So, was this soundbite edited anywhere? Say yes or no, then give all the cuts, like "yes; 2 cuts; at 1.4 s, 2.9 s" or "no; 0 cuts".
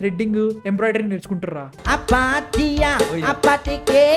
yes; 1 cut; at 1.8 s